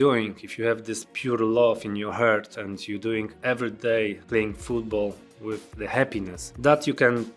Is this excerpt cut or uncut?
uncut